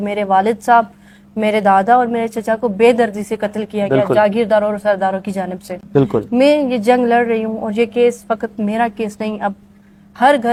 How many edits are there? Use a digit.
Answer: 0